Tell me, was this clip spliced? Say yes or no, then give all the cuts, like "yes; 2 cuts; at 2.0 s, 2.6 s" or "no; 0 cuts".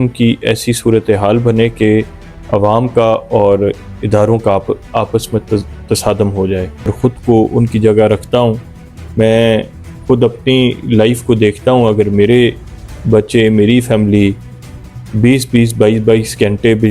yes; 1 cut; at 6.9 s